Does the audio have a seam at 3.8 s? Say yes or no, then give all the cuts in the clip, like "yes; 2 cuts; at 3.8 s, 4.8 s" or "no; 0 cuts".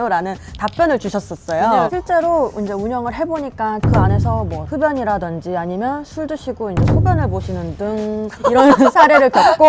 yes; 2 cuts; at 1.6 s, 3.8 s